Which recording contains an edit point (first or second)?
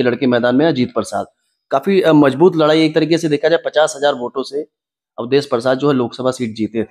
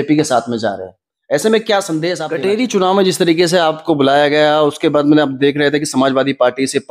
second